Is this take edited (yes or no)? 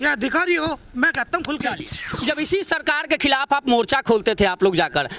yes